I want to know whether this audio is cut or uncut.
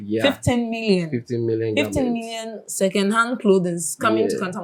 uncut